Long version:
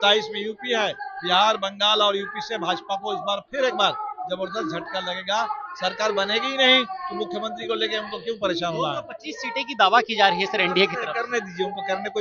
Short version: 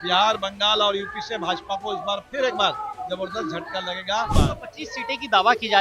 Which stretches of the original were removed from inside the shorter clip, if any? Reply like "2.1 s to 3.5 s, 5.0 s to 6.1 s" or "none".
5.6 s to 8.8 s